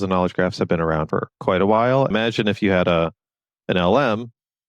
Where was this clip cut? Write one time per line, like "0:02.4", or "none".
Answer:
0:01.1
0:02.1

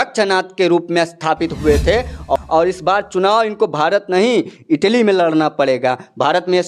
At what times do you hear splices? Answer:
0:02.4

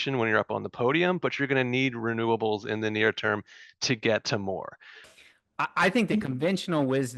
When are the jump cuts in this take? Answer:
0:05.1

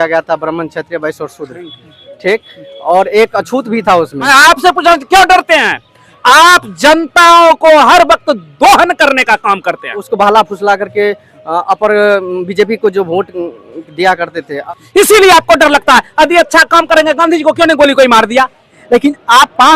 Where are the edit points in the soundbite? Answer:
0:04.3
0:10.1
0:14.5
0:18.7

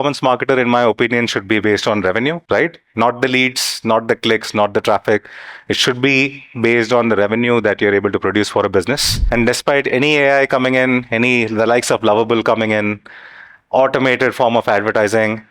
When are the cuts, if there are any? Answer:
0:02.4
0:09.1

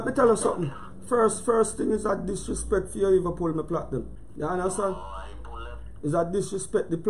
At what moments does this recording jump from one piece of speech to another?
0:04.2

